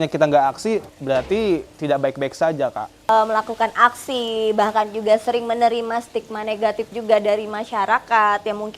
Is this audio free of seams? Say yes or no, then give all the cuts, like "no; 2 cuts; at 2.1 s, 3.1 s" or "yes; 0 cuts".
no; 2 cuts; at 0.9 s, 3.1 s